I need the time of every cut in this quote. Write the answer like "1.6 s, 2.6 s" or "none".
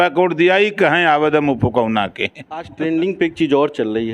2.7 s